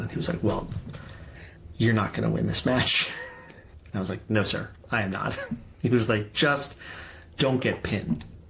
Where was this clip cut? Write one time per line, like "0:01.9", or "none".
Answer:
0:03.7